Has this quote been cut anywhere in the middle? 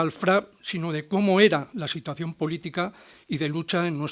yes; 1 cut; at 1.0 s

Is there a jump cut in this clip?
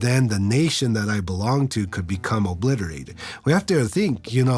no; 0 cuts

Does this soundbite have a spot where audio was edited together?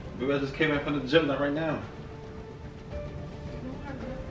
yes; 1 cut; at 3.1 s

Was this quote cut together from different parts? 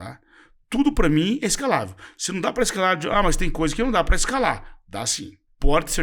no; 0 cuts

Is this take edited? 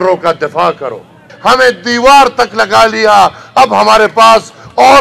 yes; 1 cut; at 1.3 s

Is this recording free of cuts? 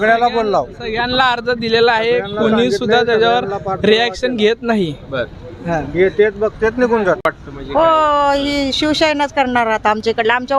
no; 1 cut; at 7.2 s

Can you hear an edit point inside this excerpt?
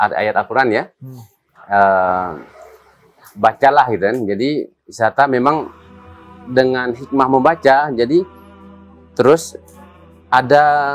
no; 0 cuts

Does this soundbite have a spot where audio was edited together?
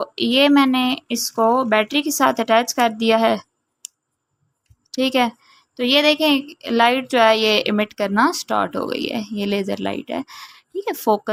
no; 0 cuts

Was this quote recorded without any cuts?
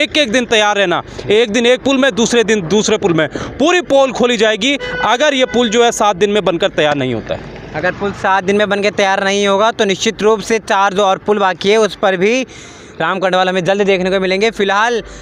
yes; 0 cuts

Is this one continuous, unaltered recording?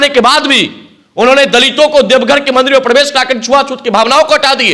yes; 0 cuts

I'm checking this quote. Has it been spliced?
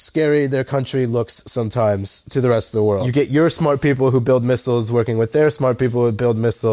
yes; 1 cut; at 3.1 s

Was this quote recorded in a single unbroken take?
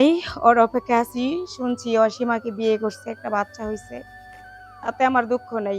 yes; 0 cuts

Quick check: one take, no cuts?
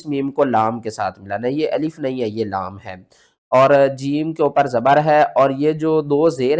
yes; 0 cuts

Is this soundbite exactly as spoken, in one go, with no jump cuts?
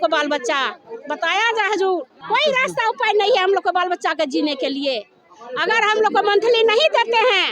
yes; 0 cuts

